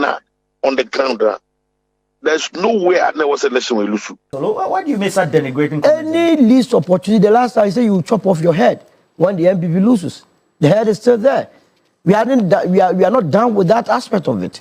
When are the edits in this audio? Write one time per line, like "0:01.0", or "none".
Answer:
0:04.2